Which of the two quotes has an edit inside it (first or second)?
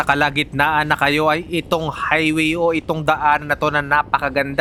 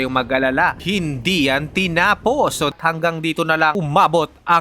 second